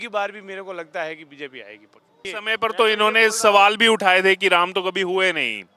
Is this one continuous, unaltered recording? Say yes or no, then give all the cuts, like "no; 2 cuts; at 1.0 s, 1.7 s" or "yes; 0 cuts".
no; 1 cut; at 2.3 s